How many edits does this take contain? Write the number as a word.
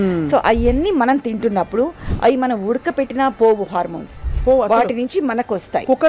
zero